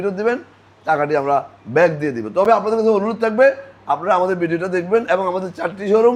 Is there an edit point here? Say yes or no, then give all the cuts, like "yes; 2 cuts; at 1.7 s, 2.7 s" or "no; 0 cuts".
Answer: no; 0 cuts